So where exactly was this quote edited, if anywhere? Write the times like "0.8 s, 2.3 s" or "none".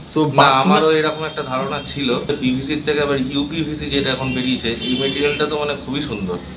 2.3 s